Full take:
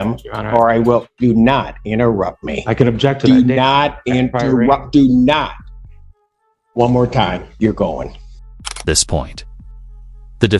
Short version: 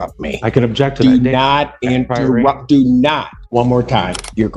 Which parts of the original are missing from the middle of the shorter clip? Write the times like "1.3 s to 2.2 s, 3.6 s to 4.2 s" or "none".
5.6 s to 6.6 s